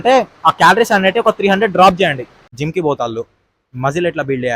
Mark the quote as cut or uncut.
cut